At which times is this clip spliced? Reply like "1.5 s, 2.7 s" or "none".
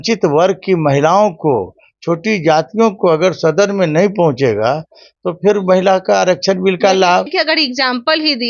7.3 s